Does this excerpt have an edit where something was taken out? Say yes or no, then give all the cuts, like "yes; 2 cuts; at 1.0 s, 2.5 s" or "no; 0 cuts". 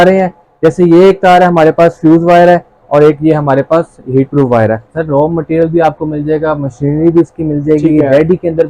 yes; 1 cut; at 4.9 s